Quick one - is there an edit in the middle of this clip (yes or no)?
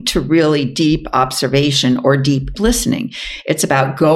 yes